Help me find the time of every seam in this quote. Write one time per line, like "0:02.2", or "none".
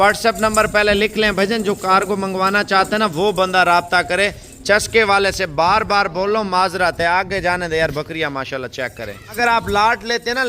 0:09.4